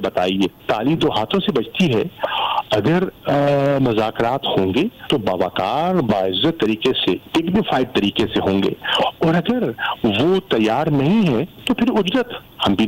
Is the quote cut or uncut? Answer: cut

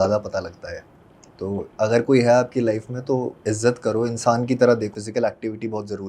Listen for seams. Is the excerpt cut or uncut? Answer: cut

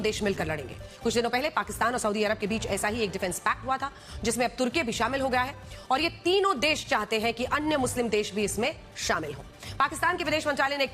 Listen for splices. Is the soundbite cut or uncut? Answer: uncut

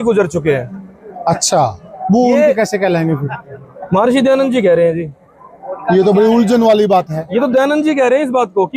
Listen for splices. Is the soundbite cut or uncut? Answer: uncut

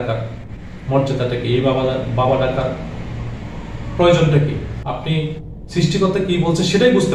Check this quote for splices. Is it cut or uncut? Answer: cut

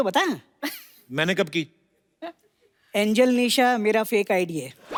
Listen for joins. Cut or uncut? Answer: uncut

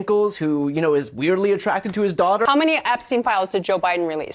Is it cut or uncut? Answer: cut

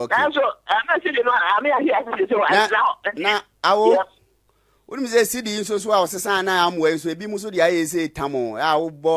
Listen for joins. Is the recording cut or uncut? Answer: uncut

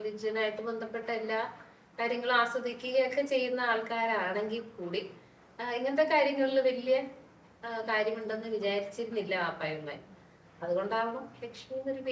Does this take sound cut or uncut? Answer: uncut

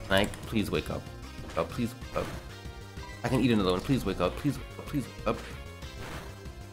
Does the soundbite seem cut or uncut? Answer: uncut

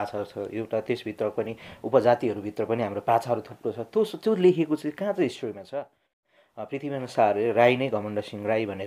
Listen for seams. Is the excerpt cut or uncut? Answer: cut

